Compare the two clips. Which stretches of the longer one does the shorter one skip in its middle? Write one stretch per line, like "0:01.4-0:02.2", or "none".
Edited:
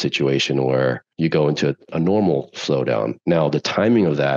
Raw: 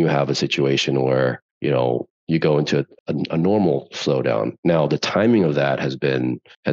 0:01.4-0:02.2
0:03.0-0:03.3